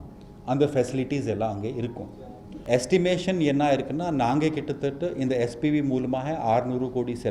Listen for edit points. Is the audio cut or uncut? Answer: cut